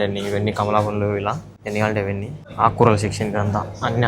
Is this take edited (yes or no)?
yes